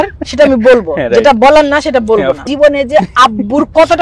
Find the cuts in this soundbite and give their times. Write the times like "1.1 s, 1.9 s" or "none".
2.5 s